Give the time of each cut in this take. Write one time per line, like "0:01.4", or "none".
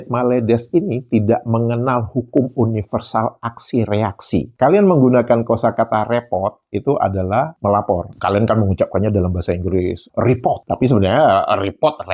0:04.5